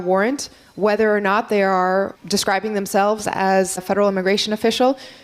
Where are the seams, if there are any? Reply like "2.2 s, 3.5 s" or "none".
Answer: 2.2 s, 3.8 s